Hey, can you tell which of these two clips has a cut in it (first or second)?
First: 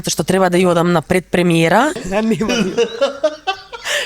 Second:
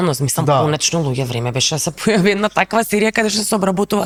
first